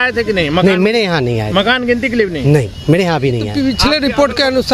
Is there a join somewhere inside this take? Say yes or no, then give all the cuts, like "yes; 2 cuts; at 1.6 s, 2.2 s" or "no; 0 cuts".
yes; 1 cut; at 3.5 s